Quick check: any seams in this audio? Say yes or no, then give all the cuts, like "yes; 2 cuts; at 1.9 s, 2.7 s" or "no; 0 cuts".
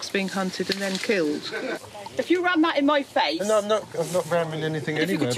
yes; 1 cut; at 1.8 s